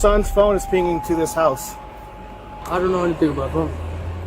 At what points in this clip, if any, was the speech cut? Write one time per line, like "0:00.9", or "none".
0:02.5